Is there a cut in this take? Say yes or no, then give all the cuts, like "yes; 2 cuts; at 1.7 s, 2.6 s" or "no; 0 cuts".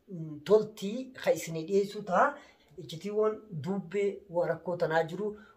yes; 1 cut; at 2.6 s